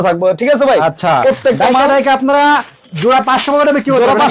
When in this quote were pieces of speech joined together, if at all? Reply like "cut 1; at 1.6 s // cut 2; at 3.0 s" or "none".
none